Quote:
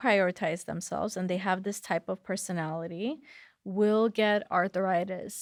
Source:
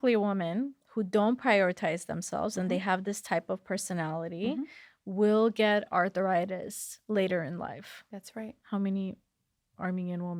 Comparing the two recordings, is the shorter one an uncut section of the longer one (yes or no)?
yes